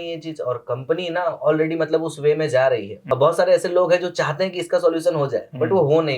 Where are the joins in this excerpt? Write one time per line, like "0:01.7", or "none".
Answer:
0:02.9